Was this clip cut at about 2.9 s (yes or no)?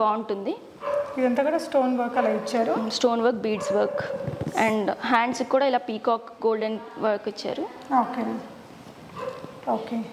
no